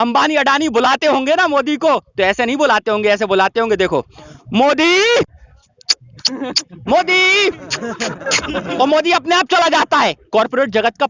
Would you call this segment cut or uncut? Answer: uncut